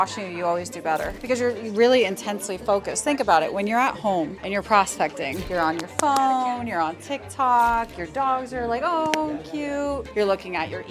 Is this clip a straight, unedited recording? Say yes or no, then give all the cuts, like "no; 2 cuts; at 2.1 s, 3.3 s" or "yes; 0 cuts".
no; 4 cuts; at 1.1 s, 4.4 s, 5.4 s, 10.1 s